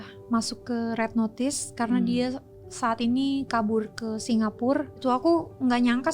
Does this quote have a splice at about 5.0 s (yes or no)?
yes